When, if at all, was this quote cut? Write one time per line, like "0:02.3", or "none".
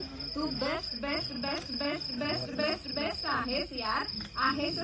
none